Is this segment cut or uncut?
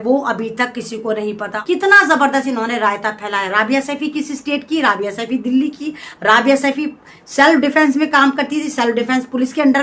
cut